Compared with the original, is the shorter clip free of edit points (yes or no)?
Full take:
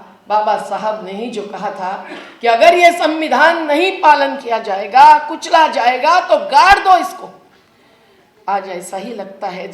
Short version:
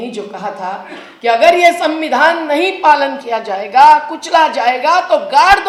yes